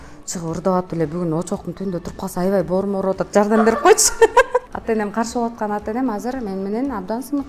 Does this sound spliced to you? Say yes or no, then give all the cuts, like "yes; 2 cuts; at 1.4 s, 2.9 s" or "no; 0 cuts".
yes; 1 cut; at 4.7 s